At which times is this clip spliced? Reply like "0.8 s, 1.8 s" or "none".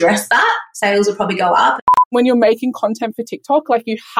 1.8 s